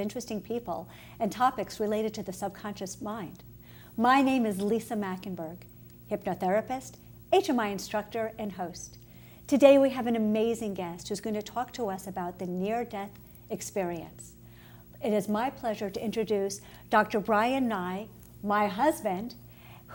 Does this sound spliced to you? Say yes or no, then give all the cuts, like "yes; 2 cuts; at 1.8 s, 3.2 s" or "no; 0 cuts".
no; 0 cuts